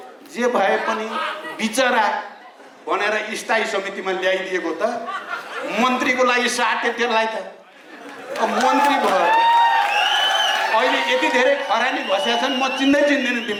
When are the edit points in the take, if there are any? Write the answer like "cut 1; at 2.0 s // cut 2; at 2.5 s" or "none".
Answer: none